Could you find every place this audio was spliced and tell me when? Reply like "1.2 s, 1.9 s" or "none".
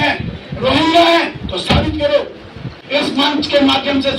2.8 s